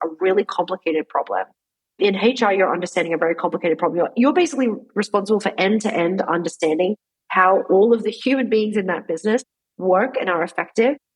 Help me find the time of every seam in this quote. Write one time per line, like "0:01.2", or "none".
0:02.0